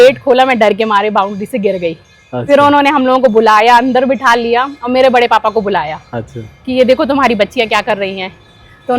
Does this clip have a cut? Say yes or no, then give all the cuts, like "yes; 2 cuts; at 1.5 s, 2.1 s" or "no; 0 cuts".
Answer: no; 0 cuts